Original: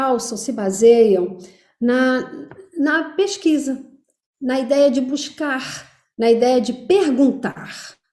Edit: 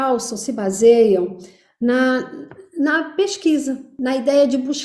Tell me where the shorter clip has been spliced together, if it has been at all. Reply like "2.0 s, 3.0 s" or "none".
3.9 s